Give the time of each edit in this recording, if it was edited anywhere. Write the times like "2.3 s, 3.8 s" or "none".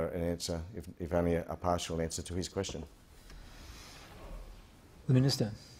none